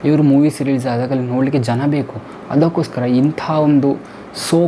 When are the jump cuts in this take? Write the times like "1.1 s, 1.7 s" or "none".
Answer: none